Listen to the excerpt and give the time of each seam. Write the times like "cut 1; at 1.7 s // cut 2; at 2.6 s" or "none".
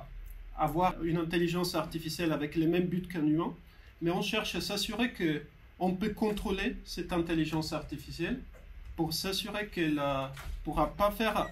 cut 1; at 0.9 s

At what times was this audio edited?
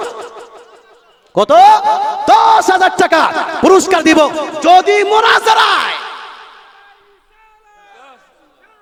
none

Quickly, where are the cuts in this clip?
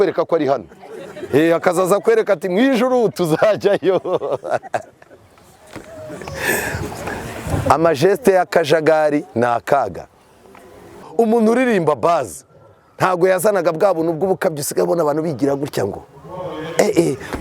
cut 1; at 11.0 s

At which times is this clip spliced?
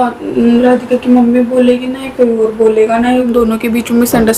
cut 1; at 3.3 s

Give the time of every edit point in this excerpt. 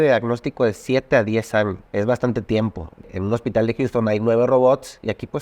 cut 1; at 1.8 s // cut 2; at 3.1 s

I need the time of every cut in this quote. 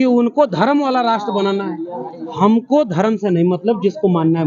none

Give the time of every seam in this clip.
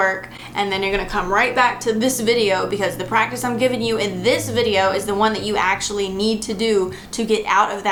none

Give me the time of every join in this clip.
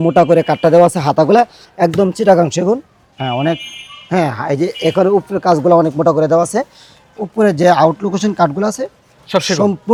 none

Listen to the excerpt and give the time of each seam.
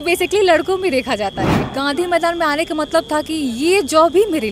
cut 1; at 1.6 s

